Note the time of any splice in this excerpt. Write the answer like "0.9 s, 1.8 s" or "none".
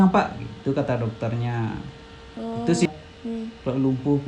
2.9 s